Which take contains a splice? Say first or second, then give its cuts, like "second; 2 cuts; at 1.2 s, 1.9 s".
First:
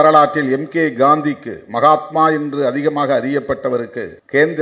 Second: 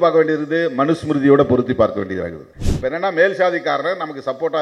second; 1 cut; at 2.5 s